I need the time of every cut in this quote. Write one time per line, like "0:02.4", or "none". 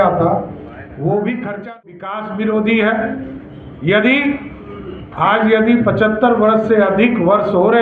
0:02.0